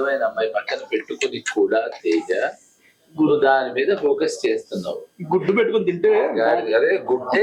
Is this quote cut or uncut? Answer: uncut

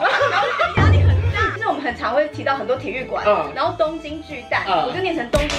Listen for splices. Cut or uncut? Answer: cut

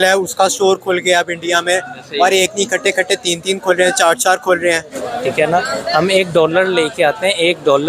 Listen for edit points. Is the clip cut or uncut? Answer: cut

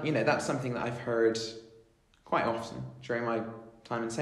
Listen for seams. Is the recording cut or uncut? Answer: uncut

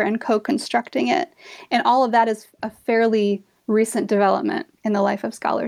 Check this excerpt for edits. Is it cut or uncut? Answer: cut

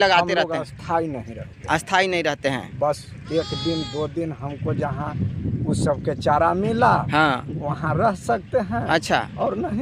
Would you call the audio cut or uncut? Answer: uncut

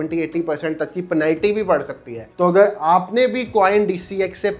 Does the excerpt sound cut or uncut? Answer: uncut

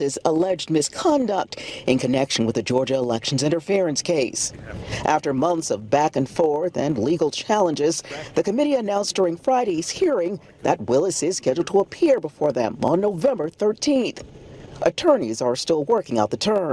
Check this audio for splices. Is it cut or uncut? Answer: uncut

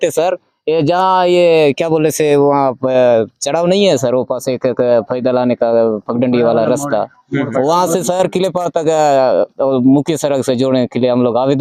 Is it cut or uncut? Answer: uncut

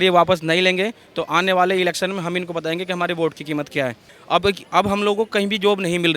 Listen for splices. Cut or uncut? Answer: cut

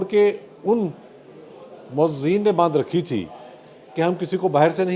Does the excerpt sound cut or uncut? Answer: uncut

